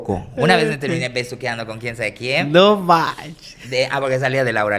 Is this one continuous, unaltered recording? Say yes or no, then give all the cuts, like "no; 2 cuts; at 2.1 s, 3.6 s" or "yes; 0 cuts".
yes; 0 cuts